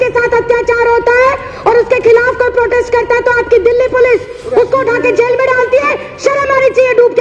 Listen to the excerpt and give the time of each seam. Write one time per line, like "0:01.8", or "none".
none